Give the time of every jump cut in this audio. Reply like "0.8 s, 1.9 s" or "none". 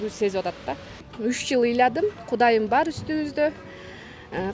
1.1 s